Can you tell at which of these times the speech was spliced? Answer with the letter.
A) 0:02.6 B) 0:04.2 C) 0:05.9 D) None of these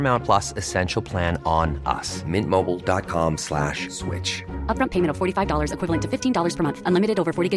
D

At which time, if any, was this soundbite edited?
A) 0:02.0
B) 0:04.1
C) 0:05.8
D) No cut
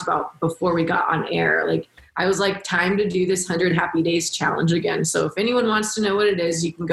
A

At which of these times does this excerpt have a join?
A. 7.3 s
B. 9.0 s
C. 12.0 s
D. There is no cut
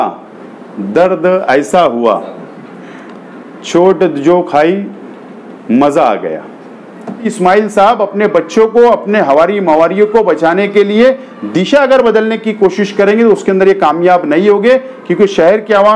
A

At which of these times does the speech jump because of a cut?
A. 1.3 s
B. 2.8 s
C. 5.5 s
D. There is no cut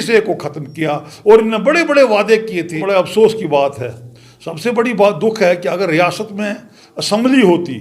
B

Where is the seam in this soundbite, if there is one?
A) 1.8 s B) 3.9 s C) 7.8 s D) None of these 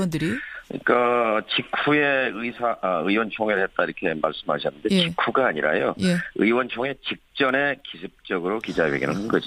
D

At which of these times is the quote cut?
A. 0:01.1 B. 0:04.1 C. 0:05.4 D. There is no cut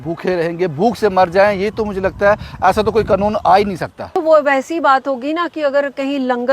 B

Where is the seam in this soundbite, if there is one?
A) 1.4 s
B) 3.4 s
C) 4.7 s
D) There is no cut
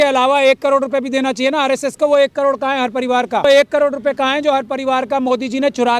B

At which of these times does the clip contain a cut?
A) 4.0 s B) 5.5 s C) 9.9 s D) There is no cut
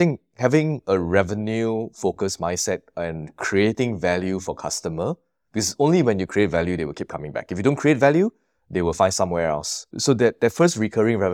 C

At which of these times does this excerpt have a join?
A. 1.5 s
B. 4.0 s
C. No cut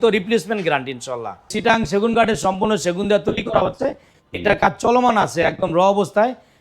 A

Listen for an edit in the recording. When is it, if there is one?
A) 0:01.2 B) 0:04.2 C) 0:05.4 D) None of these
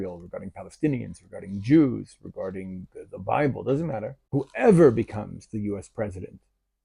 B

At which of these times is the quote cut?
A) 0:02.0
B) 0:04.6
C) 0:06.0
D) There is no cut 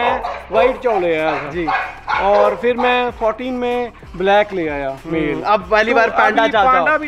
D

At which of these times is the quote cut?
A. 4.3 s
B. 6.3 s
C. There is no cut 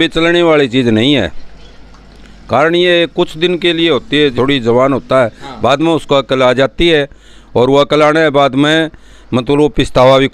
A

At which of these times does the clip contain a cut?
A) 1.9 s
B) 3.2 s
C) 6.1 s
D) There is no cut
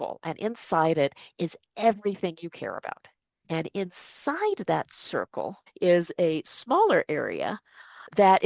D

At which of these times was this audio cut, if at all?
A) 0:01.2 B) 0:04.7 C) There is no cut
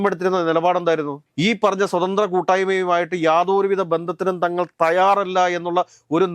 A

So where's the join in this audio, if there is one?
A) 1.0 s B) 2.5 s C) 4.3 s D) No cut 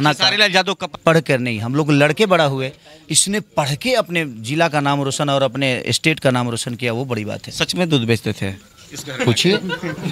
A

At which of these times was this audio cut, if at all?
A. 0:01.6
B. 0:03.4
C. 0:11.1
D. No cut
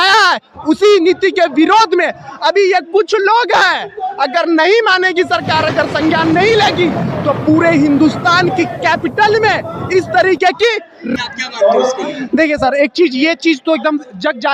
C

